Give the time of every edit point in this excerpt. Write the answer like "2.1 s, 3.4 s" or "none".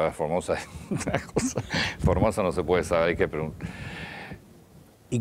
none